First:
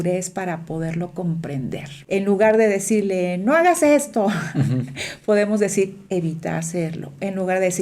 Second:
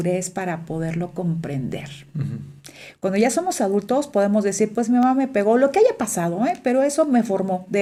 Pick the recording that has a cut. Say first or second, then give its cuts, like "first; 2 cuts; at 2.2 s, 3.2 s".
first; 1 cut; at 1.9 s